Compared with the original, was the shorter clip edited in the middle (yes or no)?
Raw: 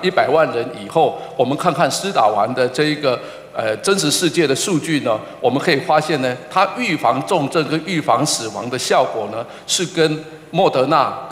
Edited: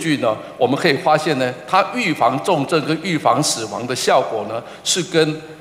no